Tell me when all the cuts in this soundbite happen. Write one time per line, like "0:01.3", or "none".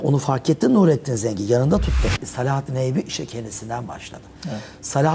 0:02.2